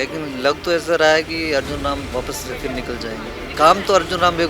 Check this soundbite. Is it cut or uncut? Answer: cut